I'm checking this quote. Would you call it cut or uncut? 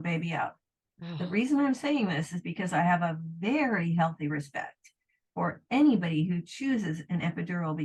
uncut